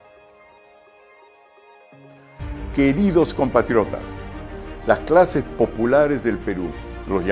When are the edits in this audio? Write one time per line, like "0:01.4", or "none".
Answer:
0:02.4

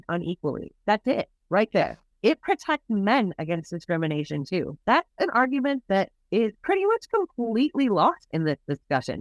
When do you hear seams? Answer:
0:02.1

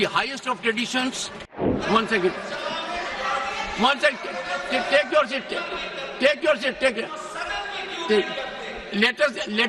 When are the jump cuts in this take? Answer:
0:01.8

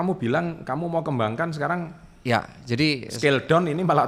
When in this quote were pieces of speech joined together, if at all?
none

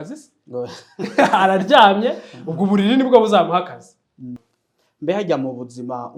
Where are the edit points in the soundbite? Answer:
0:04.4

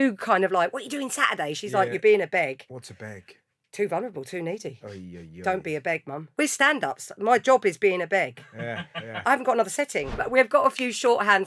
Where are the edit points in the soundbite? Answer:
0:02.7
0:06.2
0:09.2
0:10.2

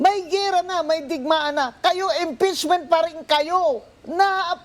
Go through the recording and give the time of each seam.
none

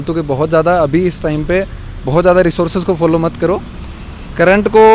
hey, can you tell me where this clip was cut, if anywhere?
none

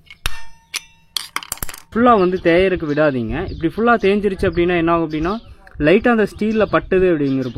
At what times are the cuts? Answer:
0:01.8

